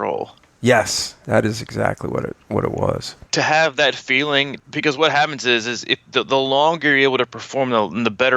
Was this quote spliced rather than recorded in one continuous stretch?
yes; 2 cuts; at 3.3 s, 4.6 s

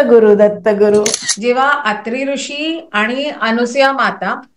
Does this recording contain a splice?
yes; 1 cut; at 1.2 s

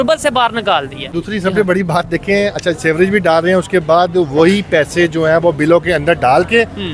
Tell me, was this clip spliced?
yes; 1 cut; at 1.2 s

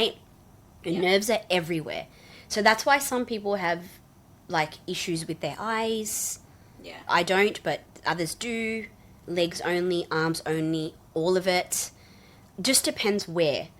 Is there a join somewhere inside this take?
yes; 3 cuts; at 7.0 s, 9.2 s, 12.4 s

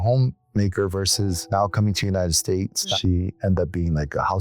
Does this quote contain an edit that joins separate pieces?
yes; 1 cut; at 2.9 s

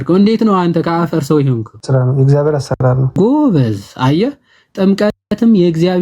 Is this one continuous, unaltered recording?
no; 2 cuts; at 1.7 s, 3.2 s

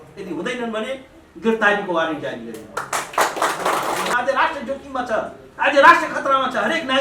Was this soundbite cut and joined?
yes; 1 cut; at 4.1 s

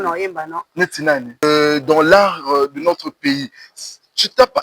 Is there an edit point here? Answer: yes; 1 cut; at 1.4 s

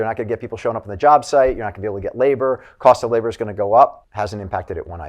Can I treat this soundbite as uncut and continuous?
no; 1 cut; at 4.0 s

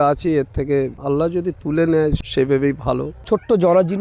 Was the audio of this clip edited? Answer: yes; 2 cuts; at 2.2 s, 3.2 s

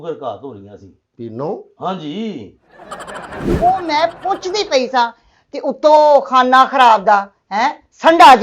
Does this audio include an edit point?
yes; 1 cut; at 3.5 s

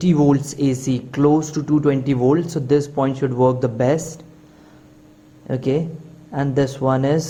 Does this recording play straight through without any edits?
yes; 0 cuts

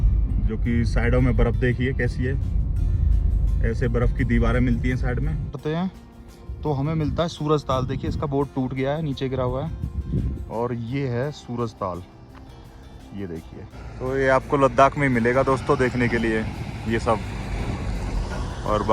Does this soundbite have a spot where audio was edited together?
yes; 2 cuts; at 5.6 s, 13.8 s

